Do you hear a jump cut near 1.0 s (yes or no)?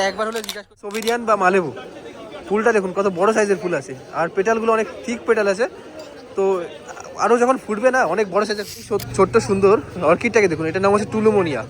yes